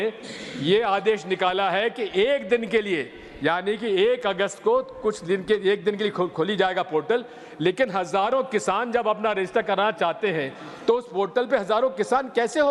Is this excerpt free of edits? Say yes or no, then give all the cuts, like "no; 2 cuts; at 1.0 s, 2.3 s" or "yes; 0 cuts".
yes; 0 cuts